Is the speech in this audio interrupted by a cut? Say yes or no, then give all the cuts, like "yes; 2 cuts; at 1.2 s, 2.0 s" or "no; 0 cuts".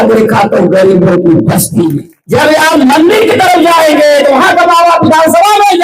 yes; 1 cut; at 2.1 s